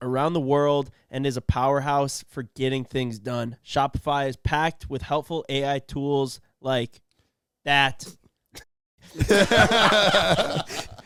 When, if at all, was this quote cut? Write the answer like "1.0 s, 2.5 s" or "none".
none

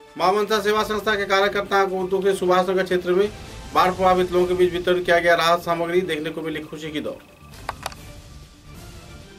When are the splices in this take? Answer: none

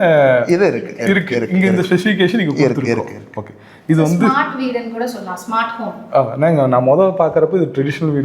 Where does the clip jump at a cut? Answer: none

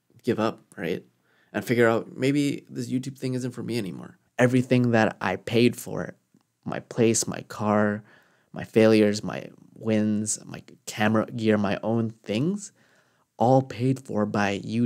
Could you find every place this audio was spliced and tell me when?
4.2 s

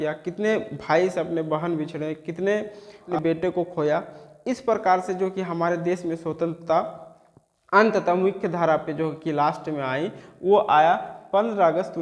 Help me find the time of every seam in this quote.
3.1 s

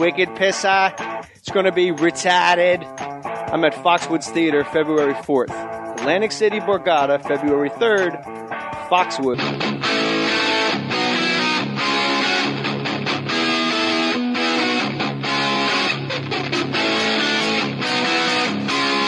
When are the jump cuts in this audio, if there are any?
none

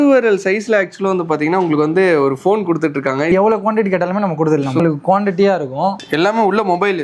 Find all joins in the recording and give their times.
3.3 s, 4.8 s, 6.0 s

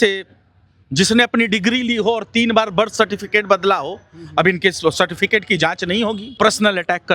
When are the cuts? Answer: 6.2 s

